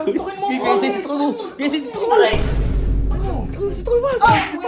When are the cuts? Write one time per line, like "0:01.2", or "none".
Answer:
0:03.0

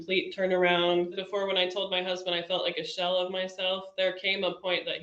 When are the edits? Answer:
0:01.2

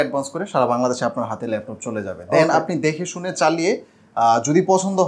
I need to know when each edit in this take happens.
none

